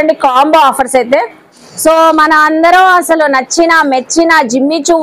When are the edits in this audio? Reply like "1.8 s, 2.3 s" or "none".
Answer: 1.6 s